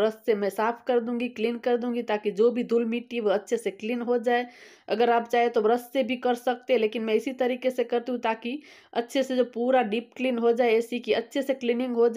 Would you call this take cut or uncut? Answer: uncut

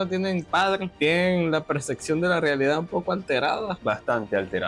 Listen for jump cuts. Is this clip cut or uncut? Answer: cut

